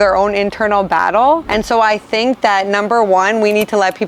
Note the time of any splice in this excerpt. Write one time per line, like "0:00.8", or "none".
0:01.5